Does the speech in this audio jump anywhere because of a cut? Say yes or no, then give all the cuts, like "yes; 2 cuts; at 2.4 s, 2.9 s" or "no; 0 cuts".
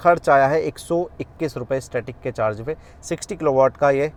no; 0 cuts